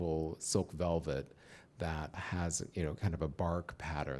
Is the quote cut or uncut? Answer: cut